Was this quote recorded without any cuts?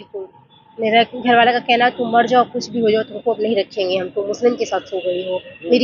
yes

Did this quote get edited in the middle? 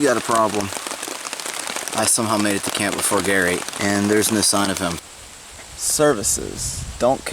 yes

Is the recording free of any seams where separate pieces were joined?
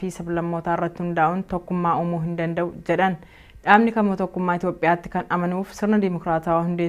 yes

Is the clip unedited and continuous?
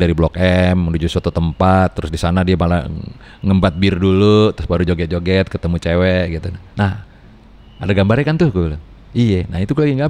yes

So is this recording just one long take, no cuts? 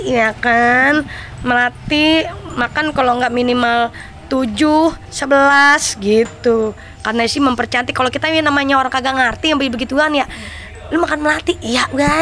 yes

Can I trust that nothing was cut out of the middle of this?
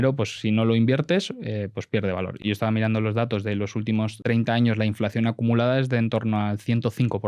no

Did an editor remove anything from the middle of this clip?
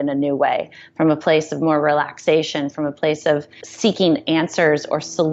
no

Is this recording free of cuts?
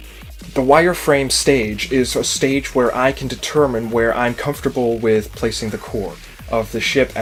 yes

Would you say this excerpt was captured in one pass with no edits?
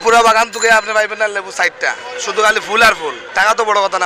yes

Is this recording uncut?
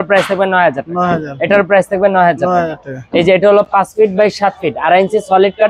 yes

